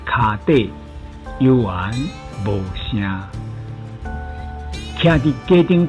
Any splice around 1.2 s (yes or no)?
no